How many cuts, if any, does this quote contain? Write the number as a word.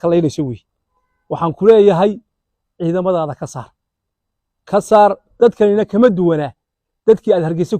one